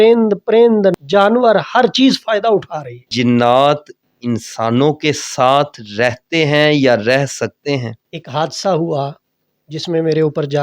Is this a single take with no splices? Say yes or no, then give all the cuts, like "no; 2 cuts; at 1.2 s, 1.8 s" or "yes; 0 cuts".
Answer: no; 3 cuts; at 1.0 s, 3.3 s, 8.0 s